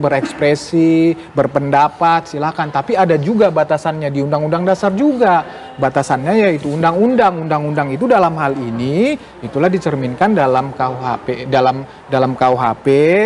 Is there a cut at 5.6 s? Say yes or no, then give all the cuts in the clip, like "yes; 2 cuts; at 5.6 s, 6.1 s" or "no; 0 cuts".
no; 0 cuts